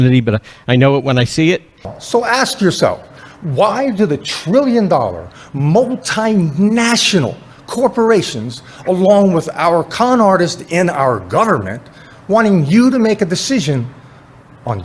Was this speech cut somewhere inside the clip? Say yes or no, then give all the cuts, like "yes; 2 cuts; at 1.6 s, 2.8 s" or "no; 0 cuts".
yes; 1 cut; at 2.0 s